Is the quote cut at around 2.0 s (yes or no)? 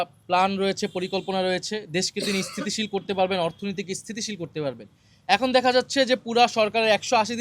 no